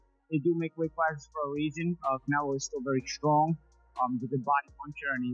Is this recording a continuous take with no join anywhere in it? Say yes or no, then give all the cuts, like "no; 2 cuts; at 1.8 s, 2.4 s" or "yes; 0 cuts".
yes; 0 cuts